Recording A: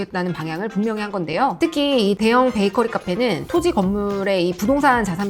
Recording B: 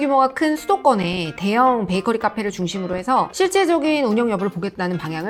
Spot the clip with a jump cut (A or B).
A